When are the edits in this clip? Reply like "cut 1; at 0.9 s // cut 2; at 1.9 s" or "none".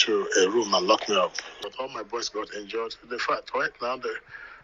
cut 1; at 1.5 s